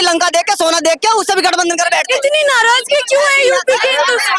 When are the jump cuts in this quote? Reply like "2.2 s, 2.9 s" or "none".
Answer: none